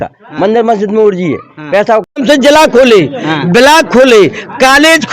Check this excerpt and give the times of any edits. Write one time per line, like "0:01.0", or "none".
0:02.1